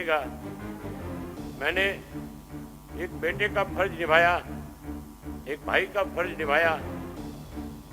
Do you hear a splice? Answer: yes; 1 cut; at 6.8 s

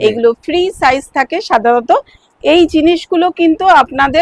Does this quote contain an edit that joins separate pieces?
no; 0 cuts

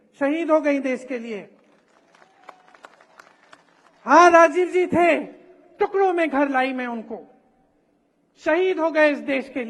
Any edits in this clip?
no; 0 cuts

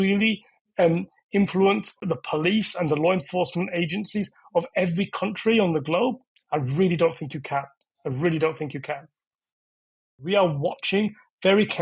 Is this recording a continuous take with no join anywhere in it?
no; 2 cuts; at 2.1 s, 10.2 s

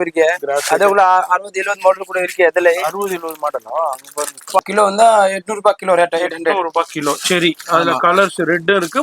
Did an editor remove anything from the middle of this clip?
yes; 1 cut; at 4.6 s

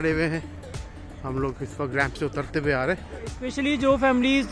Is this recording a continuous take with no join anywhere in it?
no; 1 cut; at 3.4 s

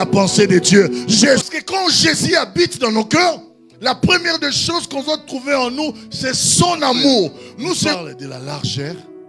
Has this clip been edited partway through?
yes; 2 cuts; at 1.5 s, 7.9 s

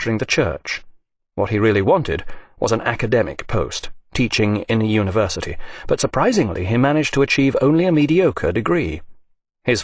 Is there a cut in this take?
no; 0 cuts

